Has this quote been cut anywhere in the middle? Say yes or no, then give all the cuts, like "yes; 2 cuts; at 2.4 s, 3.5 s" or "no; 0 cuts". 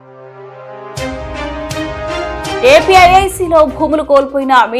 yes; 2 cuts; at 1.0 s, 2.6 s